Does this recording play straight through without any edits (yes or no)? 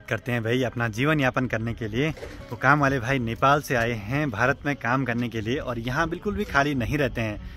yes